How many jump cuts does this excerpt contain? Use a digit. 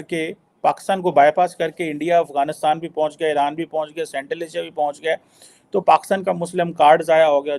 0